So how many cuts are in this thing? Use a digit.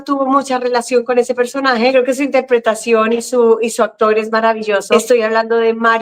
2